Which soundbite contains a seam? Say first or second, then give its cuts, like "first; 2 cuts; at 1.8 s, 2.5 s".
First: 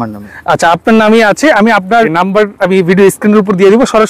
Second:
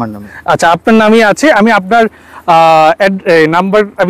first; 1 cut; at 2.2 s